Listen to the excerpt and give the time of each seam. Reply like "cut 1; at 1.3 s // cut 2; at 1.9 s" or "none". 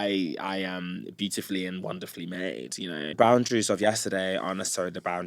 cut 1; at 3.1 s